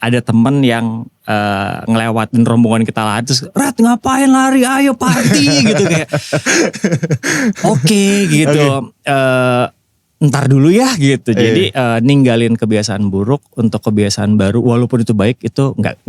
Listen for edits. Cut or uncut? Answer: uncut